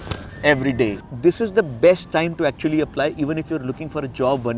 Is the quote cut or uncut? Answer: cut